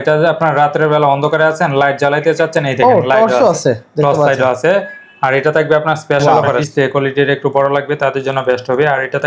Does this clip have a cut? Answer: yes; 1 cut; at 6.2 s

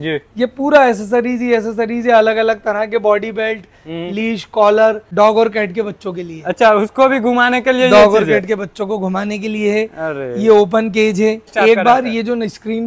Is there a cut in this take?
yes; 2 cuts; at 5.0 s, 11.5 s

